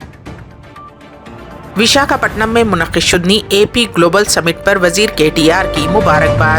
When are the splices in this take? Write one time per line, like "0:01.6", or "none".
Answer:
none